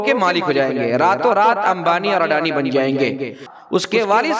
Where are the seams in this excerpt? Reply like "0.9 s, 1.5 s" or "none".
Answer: 3.5 s